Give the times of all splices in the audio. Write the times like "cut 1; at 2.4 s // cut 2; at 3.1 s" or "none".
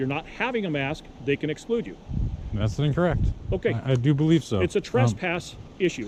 none